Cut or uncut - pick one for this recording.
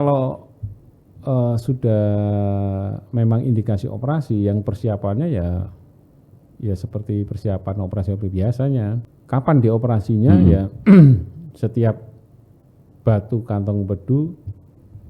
cut